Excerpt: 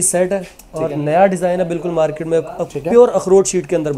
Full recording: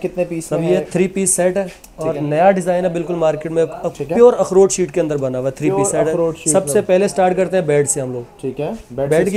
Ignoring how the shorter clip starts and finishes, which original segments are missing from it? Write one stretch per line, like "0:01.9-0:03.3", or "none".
none